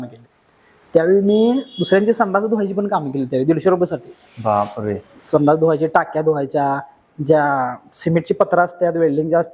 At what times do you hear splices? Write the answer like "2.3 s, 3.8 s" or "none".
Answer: none